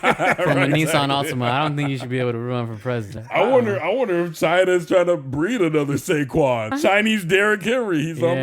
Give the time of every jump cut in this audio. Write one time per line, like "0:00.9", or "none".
0:03.1
0:06.7